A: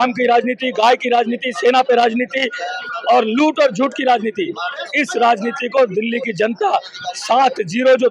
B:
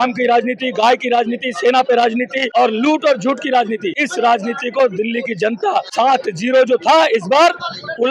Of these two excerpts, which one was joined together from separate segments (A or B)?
B